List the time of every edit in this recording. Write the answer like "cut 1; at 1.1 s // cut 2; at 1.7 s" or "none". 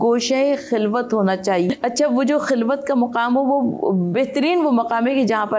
cut 1; at 1.7 s

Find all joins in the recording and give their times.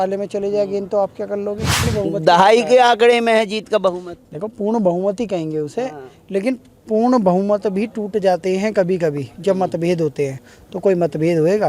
cut 1; at 1.8 s

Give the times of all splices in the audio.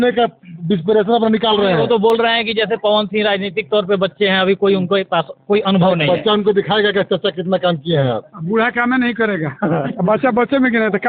none

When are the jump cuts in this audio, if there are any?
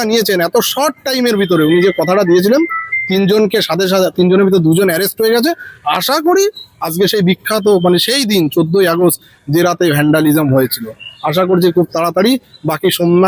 none

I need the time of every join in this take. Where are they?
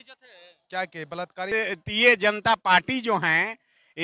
cut 1; at 1.5 s

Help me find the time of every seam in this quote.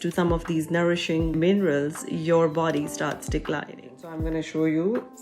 cut 1; at 1.3 s // cut 2; at 4.2 s

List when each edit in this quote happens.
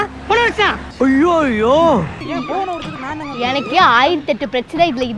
cut 1; at 2.2 s

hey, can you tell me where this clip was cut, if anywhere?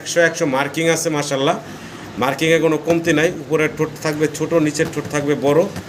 none

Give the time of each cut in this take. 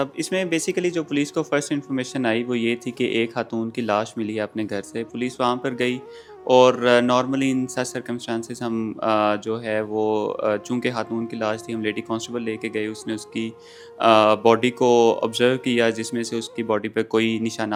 none

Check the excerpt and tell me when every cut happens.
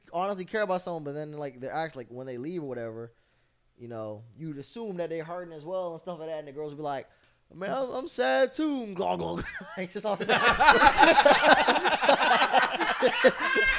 none

